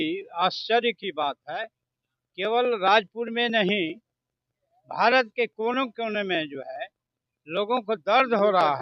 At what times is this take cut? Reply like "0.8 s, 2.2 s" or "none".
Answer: none